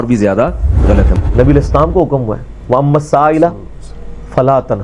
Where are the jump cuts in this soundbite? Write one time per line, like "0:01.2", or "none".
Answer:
0:01.1